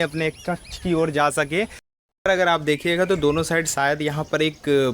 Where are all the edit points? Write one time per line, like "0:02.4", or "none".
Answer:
0:01.8